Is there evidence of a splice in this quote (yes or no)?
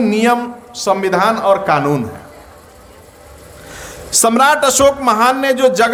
no